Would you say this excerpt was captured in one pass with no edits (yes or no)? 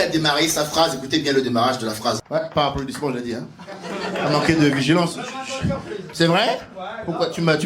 no